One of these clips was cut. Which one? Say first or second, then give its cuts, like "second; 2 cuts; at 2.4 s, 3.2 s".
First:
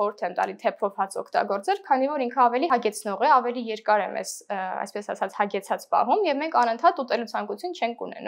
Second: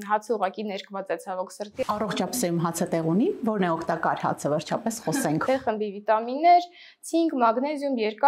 second; 2 cuts; at 1.8 s, 5.4 s